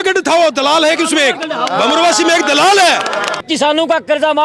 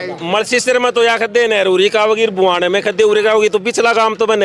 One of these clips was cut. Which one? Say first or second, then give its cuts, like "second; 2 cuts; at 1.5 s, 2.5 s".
first; 1 cut; at 3.4 s